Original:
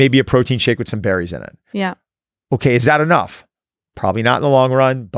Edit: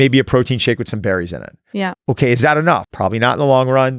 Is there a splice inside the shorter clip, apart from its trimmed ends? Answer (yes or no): yes